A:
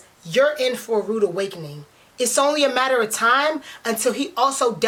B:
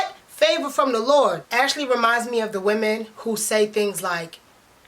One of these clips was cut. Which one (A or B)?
B